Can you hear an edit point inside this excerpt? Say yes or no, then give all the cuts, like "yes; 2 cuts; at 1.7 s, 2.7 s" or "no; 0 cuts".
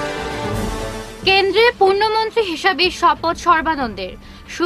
no; 0 cuts